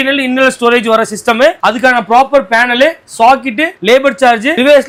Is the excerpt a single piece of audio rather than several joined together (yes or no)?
yes